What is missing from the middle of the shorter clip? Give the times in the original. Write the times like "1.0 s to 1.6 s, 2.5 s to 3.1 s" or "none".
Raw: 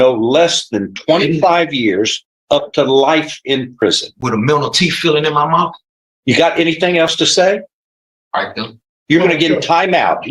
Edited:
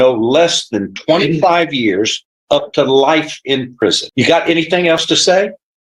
4.0 s to 6.1 s